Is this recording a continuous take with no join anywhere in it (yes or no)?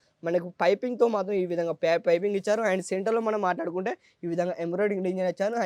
yes